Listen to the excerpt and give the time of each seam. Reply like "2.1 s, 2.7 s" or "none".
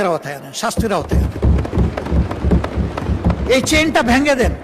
none